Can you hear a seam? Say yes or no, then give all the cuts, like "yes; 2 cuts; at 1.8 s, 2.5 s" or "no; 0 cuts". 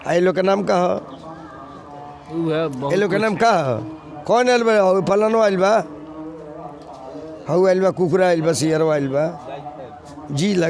no; 0 cuts